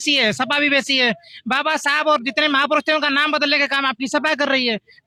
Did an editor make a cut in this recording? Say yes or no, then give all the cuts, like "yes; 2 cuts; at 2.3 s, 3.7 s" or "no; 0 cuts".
no; 0 cuts